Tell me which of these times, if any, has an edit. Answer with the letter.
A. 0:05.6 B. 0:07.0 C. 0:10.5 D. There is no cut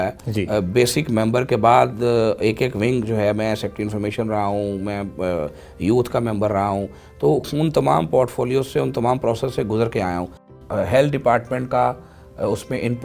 C